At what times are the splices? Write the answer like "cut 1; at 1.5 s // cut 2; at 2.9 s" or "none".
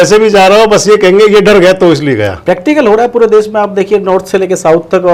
none